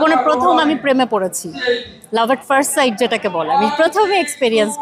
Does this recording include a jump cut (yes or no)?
no